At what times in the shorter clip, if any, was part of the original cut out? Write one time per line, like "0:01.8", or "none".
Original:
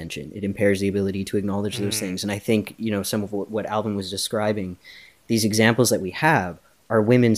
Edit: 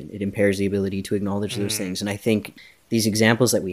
0:02.5